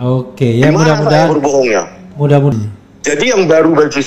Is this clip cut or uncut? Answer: cut